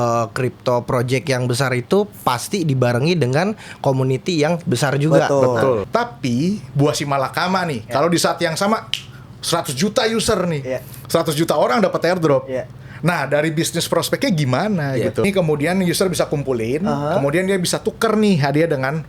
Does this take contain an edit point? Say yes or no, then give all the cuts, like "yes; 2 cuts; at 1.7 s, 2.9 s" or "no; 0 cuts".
yes; 2 cuts; at 5.9 s, 15.2 s